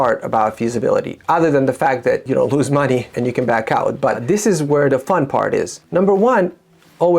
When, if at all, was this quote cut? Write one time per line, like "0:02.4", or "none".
0:02.2
0:03.1
0:04.2
0:05.8